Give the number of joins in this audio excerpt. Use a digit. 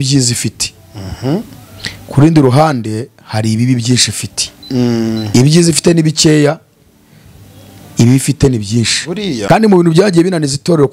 1